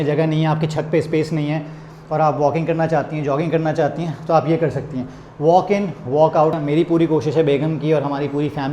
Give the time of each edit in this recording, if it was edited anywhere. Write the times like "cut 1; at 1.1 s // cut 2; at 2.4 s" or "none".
cut 1; at 6.6 s